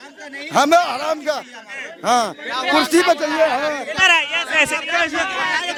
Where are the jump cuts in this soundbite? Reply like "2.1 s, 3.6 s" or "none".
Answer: none